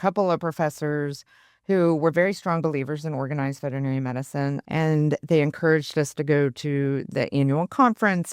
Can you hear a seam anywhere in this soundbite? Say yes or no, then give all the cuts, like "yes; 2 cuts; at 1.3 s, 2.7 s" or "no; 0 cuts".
yes; 1 cut; at 4.6 s